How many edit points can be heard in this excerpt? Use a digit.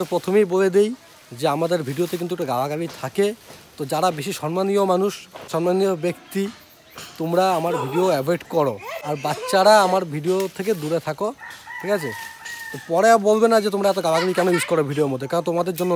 2